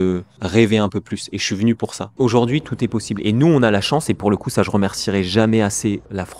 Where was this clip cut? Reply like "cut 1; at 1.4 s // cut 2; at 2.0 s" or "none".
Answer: cut 1; at 2.1 s